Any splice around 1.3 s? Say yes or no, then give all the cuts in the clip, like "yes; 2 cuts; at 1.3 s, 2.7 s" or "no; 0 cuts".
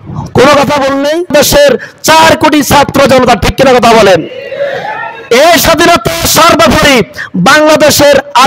yes; 1 cut; at 1.3 s